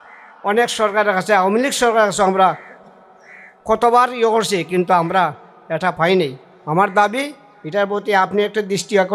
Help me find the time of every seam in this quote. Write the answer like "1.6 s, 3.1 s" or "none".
none